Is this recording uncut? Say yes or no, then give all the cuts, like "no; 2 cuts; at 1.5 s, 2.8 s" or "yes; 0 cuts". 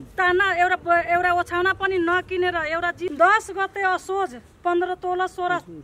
no; 1 cut; at 3.1 s